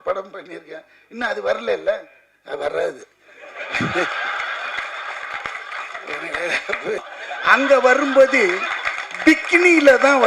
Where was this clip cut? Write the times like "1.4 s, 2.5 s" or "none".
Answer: 7.1 s

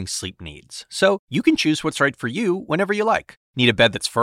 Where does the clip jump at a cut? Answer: none

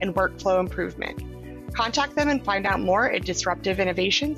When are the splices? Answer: none

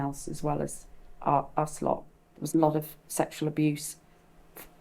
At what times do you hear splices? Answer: 2.2 s

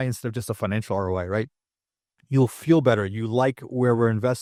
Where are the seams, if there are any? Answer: none

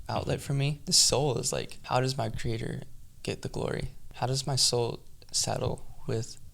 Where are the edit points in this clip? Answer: 0.9 s, 1.8 s, 4.0 s

